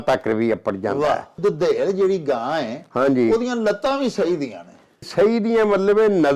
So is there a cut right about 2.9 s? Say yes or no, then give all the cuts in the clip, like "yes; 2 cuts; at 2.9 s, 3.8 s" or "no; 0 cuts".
no; 2 cuts; at 1.4 s, 5.1 s